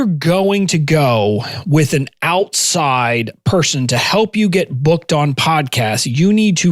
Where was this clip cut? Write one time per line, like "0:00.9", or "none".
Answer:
none